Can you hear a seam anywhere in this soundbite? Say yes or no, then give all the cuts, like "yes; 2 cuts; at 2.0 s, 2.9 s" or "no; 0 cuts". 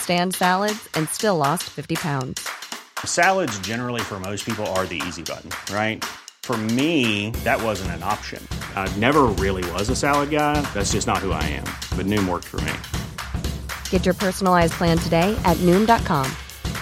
no; 0 cuts